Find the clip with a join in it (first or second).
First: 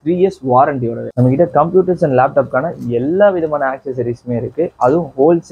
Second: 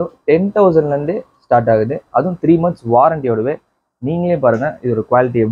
first